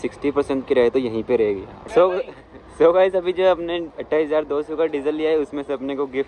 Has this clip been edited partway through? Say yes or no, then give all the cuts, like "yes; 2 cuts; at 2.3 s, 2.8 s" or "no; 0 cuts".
yes; 1 cut; at 1.7 s